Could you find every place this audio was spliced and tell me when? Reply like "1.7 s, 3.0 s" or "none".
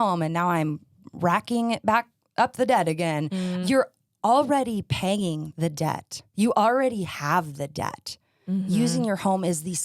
3.6 s, 6.3 s